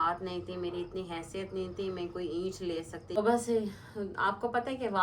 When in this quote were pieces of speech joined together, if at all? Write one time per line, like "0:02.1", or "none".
0:03.2